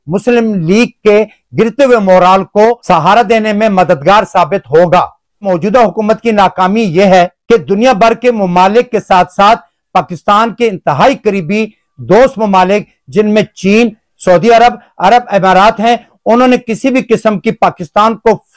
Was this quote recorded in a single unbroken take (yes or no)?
no